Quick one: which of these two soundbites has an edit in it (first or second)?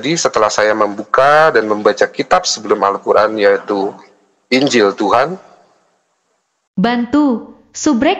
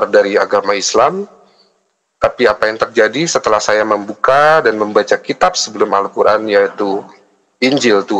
first